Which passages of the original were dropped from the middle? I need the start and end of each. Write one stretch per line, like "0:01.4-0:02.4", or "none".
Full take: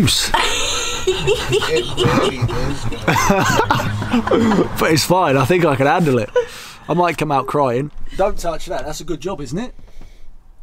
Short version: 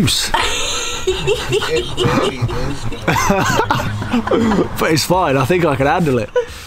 none